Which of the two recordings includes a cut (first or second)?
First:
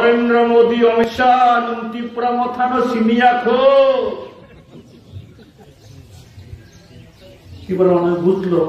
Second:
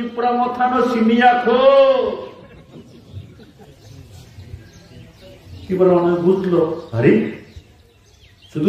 first